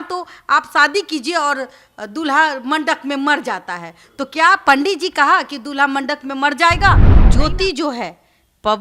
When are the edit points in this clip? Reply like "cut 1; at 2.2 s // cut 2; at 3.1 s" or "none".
cut 1; at 7.2 s